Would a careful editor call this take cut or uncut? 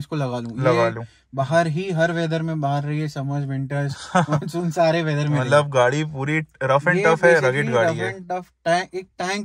uncut